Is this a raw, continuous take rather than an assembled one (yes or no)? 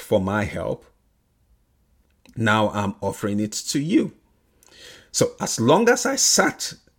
yes